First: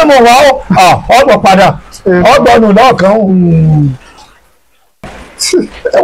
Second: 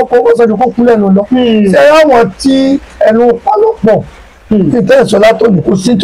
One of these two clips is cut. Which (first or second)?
first